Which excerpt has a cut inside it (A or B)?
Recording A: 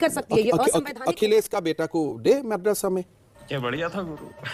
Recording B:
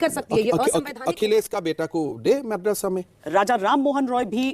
B